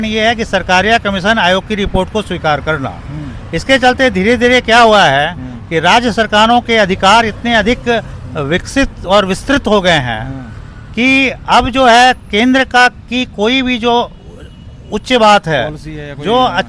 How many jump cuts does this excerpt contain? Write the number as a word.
zero